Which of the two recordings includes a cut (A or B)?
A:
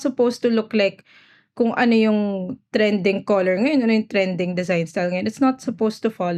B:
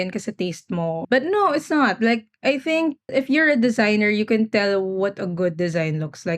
B